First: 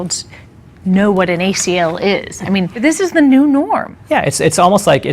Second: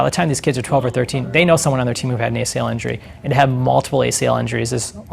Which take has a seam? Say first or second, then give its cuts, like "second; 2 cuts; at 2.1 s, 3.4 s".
first; 1 cut; at 2.8 s